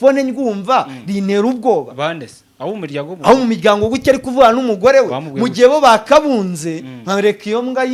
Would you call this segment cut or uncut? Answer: uncut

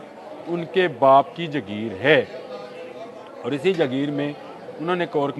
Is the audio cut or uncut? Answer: uncut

